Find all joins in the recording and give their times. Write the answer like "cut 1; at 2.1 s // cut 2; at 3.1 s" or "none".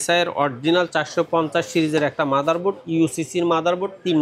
none